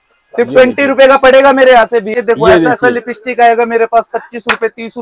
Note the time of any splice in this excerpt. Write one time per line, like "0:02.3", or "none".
0:02.1